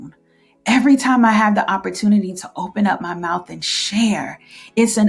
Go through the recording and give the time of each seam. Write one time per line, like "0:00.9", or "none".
none